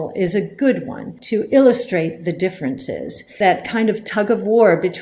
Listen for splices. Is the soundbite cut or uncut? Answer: cut